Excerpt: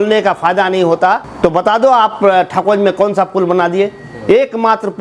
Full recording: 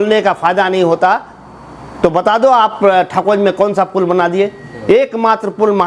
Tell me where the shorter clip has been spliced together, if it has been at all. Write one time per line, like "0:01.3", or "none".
0:01.3